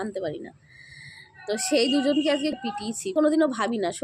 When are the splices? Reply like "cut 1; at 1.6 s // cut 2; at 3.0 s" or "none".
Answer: cut 1; at 2.5 s